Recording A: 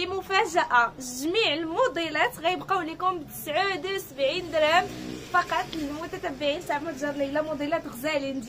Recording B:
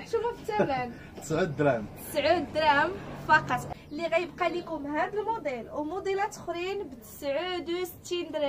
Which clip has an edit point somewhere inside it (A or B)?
B